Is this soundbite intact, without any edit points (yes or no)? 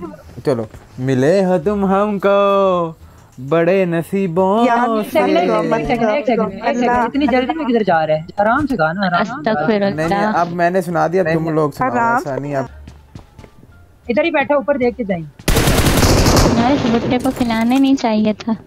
no